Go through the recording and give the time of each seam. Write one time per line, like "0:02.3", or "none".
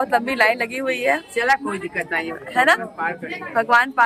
none